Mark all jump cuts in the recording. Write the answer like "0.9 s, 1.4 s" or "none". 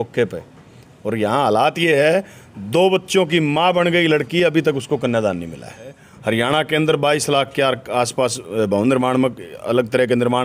6.1 s